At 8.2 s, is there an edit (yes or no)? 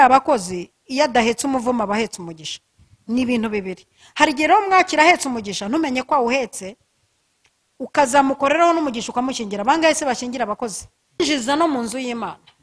no